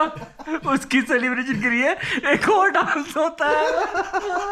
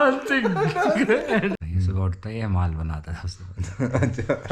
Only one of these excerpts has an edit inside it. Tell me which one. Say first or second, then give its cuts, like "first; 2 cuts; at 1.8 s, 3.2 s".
second; 1 cut; at 1.7 s